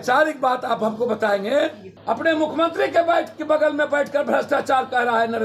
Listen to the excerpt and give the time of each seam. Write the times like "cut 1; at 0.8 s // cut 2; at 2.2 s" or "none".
cut 1; at 1.9 s